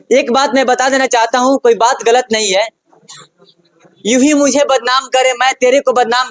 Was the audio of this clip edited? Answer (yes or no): no